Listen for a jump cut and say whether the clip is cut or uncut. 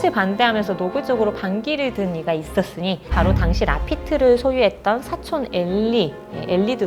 uncut